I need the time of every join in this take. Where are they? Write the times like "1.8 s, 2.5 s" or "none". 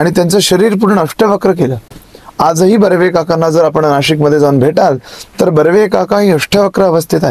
none

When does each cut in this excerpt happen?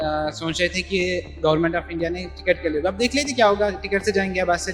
none

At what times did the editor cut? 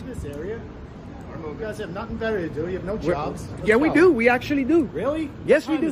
none

